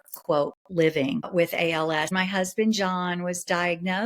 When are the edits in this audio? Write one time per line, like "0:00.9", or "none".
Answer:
0:01.3
0:02.1